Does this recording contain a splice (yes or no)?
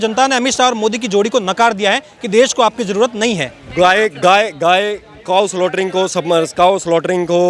no